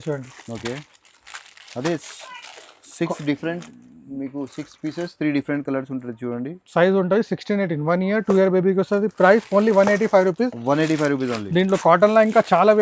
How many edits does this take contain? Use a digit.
0